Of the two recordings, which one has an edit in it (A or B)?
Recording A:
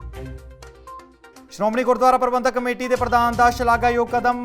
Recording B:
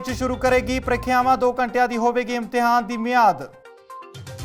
A